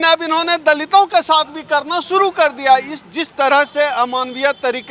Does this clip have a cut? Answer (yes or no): no